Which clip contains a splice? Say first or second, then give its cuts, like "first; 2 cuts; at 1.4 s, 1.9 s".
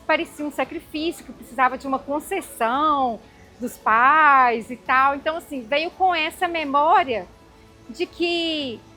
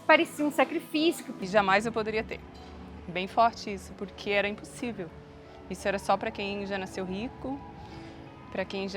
second; 1 cut; at 1.3 s